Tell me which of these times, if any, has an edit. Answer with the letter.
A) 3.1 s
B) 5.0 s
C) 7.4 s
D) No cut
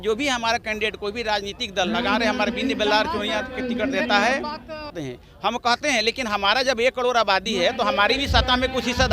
B